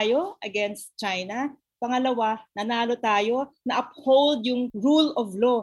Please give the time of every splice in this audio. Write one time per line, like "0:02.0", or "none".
0:04.7